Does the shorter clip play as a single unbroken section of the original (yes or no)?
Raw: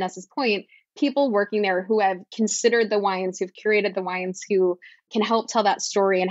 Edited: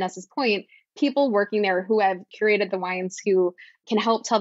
no